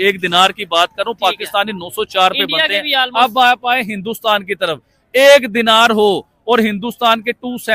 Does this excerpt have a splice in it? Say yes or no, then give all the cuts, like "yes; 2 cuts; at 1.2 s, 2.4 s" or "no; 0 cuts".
no; 0 cuts